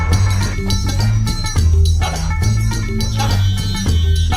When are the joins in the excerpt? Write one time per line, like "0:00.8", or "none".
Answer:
none